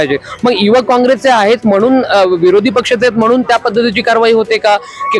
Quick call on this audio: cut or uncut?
uncut